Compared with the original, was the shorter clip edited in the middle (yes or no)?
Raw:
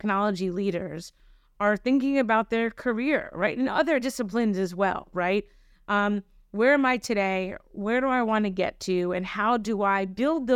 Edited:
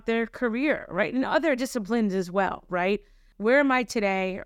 yes